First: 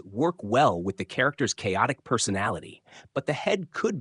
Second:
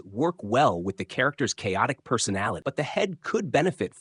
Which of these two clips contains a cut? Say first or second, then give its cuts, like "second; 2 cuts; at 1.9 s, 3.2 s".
second; 1 cut; at 2.6 s